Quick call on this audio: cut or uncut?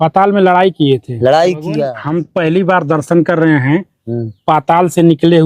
cut